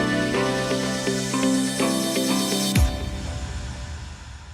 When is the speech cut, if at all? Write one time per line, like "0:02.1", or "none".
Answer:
0:01.7